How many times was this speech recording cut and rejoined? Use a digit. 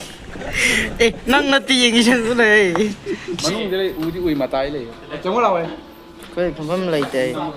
1